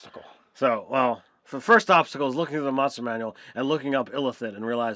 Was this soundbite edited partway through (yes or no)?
no